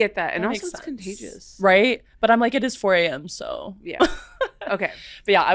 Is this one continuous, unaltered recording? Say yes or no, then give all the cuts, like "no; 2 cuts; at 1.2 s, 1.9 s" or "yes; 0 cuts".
yes; 0 cuts